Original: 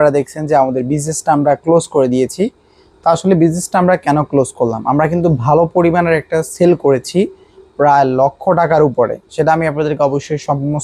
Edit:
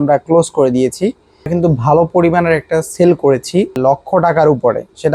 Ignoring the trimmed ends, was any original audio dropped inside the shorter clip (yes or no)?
yes